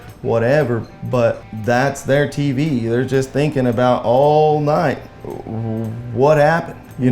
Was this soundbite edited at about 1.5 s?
yes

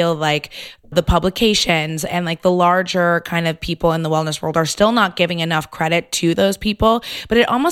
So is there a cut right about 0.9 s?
yes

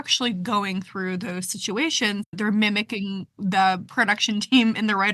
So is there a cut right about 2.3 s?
yes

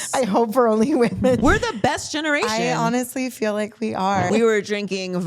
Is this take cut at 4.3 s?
yes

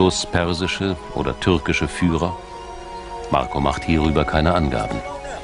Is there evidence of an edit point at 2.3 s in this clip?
no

